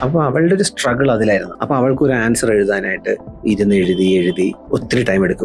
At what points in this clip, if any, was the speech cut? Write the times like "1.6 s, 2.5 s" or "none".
1.5 s, 3.3 s, 4.6 s